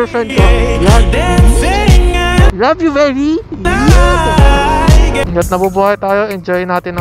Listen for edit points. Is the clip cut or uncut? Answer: cut